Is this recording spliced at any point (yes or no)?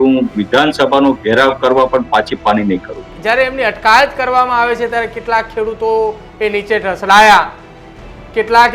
yes